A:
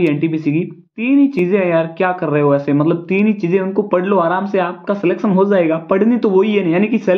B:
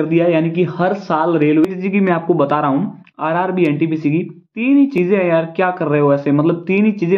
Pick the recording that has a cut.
B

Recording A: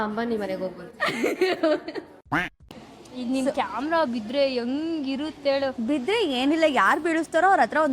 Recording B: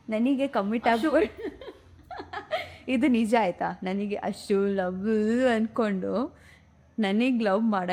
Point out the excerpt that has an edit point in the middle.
A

